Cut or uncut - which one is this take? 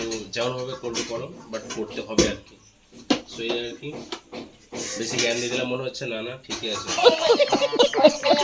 uncut